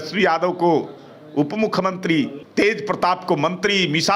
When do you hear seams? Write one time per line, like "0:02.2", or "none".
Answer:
0:02.4